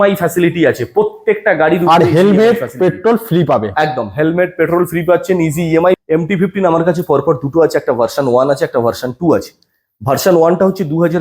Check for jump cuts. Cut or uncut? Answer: cut